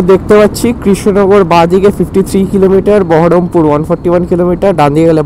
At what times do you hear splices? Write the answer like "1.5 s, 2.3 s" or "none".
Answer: none